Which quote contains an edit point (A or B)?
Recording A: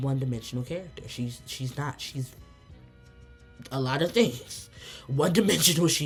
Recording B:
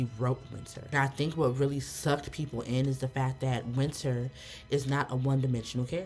B